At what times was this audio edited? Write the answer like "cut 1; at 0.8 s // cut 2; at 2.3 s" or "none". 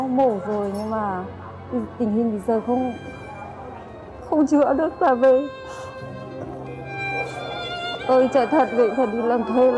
cut 1; at 7.9 s